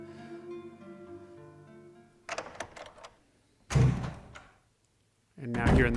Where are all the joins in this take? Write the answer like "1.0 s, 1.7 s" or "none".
4.0 s